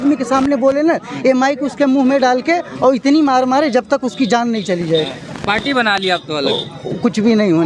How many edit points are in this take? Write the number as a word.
zero